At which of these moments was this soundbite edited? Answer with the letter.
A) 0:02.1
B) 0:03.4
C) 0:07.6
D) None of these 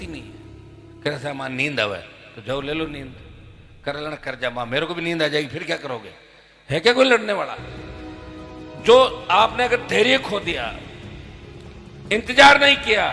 D